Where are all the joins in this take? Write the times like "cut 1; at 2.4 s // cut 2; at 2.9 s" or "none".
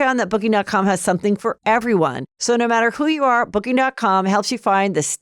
cut 1; at 2.3 s